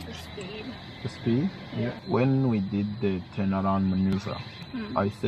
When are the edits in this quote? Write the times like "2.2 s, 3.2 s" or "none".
2.0 s